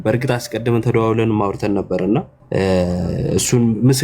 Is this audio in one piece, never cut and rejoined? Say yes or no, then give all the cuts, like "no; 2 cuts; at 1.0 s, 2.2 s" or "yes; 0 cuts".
no; 1 cut; at 2.4 s